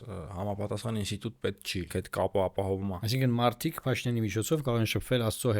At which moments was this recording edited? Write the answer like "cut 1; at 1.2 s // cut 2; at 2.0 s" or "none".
cut 1; at 1.9 s // cut 2; at 3.0 s